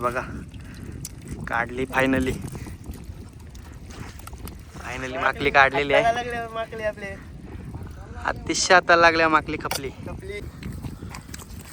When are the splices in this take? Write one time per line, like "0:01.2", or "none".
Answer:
0:10.4

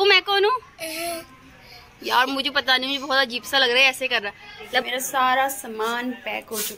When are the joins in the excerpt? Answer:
0:04.8

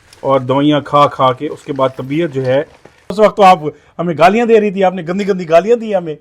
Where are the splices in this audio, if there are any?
0:03.1

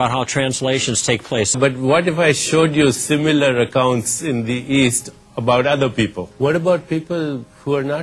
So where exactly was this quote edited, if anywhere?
0:01.5
0:06.2

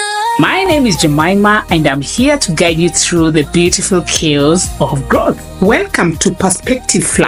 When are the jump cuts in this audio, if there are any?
none

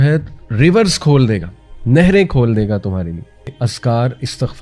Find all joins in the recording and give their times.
0:03.5

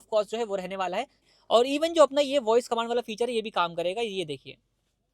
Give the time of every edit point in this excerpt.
0:01.3

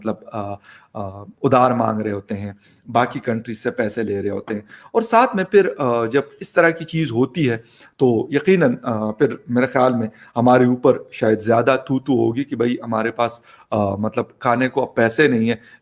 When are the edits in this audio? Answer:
none

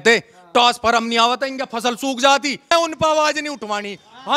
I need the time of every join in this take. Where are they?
0:02.7

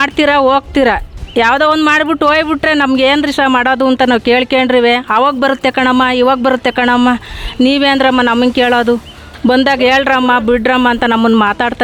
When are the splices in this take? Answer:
none

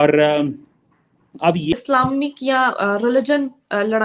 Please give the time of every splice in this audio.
0:01.7

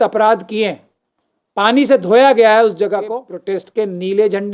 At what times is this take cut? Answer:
0:03.3

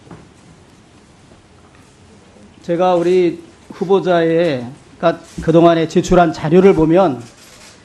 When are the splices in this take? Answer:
0:01.1

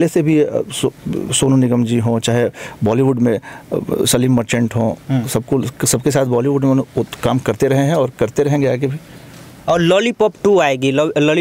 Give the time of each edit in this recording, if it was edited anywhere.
none

